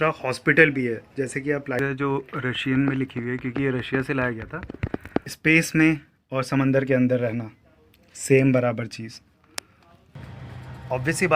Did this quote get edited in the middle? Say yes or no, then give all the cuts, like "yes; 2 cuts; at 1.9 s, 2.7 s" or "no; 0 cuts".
yes; 3 cuts; at 1.8 s, 5.3 s, 10.3 s